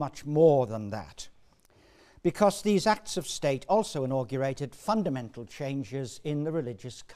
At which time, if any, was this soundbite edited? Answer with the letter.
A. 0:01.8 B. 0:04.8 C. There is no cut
A